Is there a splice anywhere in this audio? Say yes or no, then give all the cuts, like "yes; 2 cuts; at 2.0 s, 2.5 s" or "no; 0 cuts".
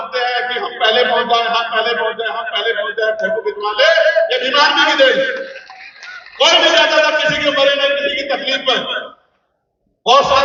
no; 0 cuts